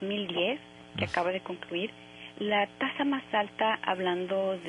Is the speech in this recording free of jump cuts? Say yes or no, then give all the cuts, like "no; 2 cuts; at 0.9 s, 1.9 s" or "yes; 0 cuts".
no; 1 cut; at 2.7 s